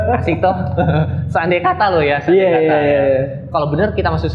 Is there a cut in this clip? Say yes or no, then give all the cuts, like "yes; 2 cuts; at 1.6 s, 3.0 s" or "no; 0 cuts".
no; 0 cuts